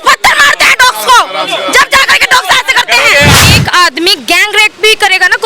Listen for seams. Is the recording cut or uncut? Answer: cut